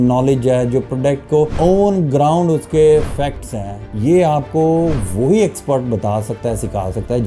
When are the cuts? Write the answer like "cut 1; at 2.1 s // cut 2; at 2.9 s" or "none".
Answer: none